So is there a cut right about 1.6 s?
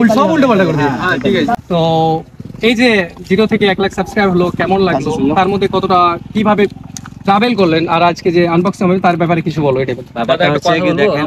yes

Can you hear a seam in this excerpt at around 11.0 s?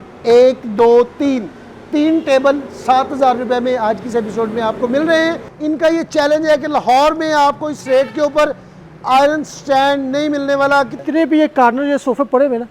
yes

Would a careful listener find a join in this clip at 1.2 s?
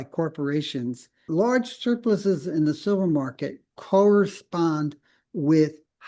yes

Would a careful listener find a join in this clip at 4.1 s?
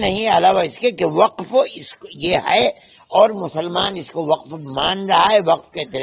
no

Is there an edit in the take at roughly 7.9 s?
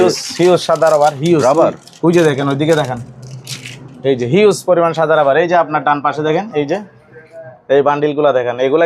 no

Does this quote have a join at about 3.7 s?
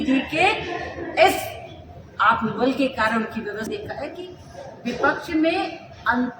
yes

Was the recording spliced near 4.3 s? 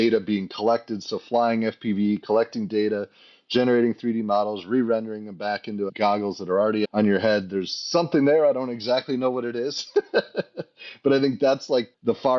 no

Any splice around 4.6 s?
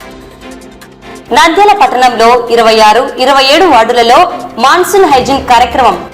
no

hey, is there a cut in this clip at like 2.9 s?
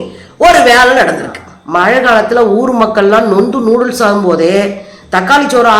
no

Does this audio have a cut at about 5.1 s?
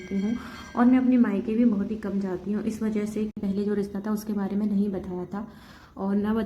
no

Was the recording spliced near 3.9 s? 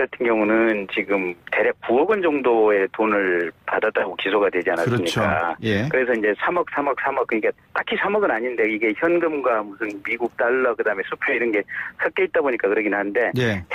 no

